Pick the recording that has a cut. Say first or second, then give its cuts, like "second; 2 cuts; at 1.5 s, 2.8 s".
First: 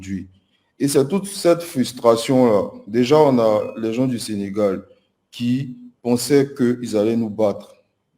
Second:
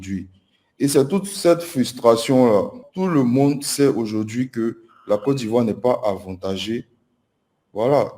second; 1 cut; at 2.8 s